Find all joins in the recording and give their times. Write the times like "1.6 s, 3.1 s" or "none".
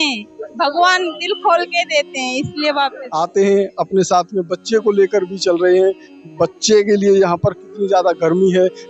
3.0 s